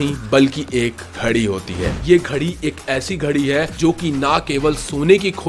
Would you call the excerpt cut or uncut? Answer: cut